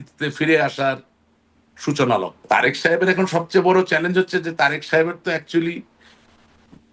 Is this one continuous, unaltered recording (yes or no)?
no